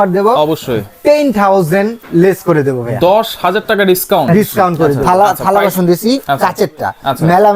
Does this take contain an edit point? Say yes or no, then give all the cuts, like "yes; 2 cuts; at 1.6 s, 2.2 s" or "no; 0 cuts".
yes; 1 cut; at 5.0 s